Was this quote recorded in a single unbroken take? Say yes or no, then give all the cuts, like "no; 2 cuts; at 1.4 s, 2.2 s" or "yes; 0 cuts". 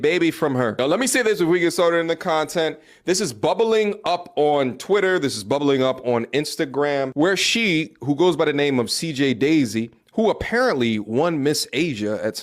no; 1 cut; at 10.4 s